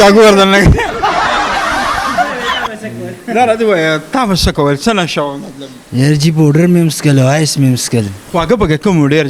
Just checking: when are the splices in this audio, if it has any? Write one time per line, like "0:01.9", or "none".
none